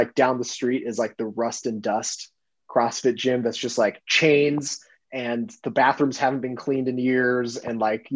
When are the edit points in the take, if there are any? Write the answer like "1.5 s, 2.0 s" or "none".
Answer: none